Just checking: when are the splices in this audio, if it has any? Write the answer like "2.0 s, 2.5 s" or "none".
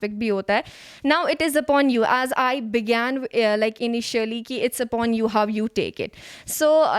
none